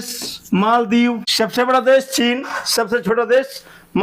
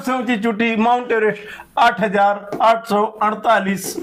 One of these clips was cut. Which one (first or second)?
first